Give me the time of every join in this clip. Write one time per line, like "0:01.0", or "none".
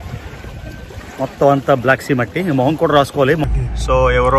0:03.4

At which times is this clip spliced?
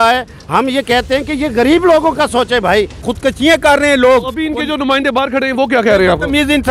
0:03.1

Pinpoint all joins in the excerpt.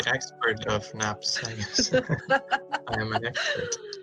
none

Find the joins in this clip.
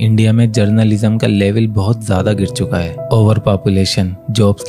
none

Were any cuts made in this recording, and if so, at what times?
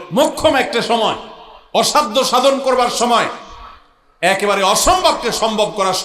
none

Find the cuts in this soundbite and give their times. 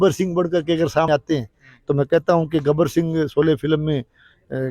0:01.1

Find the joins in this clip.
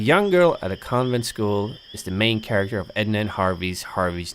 0:02.9

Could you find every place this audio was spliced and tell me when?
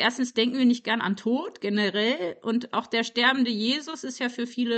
none

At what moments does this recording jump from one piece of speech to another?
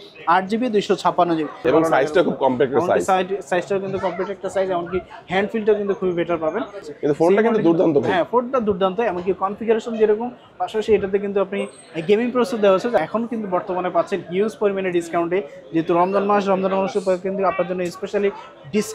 0:01.6
0:06.8
0:13.0

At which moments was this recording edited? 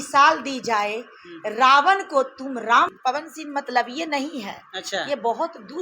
0:02.9

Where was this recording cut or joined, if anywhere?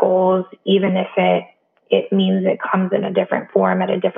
none

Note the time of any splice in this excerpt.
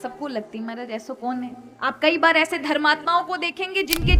0:01.7

